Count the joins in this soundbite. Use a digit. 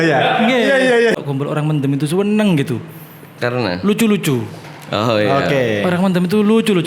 1